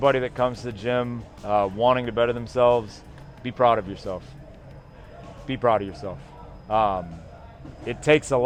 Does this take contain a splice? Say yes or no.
no